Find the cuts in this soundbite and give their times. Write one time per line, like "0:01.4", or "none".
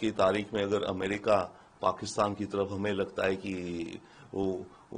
none